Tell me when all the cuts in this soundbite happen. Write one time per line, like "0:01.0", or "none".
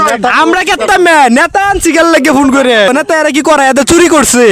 0:02.9